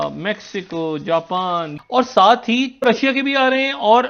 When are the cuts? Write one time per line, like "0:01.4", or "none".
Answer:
0:01.7
0:02.8